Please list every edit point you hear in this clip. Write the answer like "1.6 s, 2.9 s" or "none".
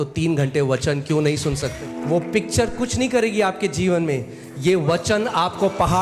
1.9 s